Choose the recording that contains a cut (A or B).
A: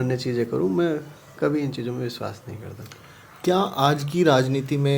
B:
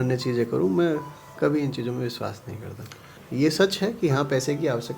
B